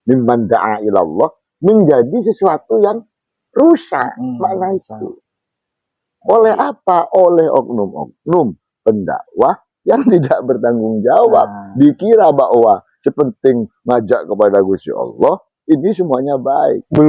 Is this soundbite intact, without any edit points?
yes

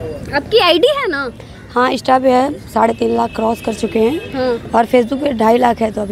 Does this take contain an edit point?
no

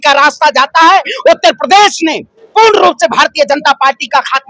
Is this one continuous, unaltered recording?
yes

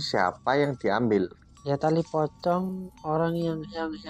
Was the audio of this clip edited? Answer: yes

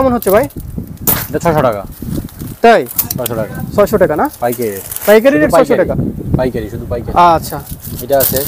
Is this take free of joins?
yes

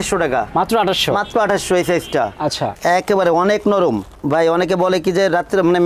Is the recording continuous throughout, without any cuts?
no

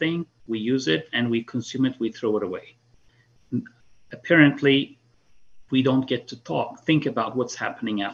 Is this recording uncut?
yes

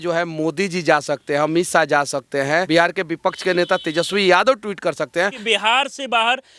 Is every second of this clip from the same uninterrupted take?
no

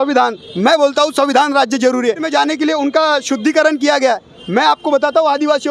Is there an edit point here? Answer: yes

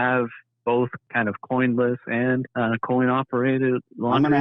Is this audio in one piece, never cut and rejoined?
no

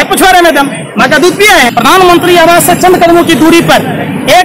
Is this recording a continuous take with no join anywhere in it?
no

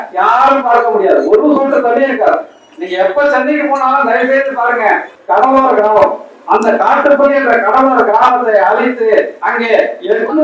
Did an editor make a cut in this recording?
yes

